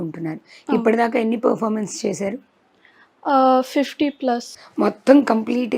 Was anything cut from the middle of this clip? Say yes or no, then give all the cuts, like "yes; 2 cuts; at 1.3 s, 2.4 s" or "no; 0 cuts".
yes; 1 cut; at 4.6 s